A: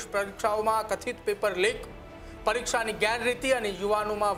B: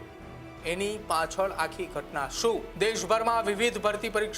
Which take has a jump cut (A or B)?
B